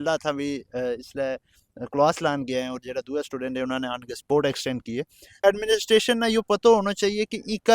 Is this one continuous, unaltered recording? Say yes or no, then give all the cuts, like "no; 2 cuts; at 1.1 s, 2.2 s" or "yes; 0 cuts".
no; 1 cut; at 5.4 s